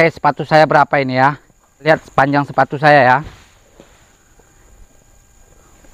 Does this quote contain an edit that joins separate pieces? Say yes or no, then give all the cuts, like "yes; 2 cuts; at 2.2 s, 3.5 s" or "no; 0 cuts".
yes; 1 cut; at 1.9 s